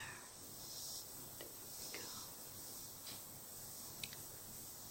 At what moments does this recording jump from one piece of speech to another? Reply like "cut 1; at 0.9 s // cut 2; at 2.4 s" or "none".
none